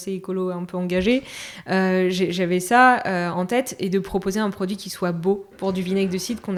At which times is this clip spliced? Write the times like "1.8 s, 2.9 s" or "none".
none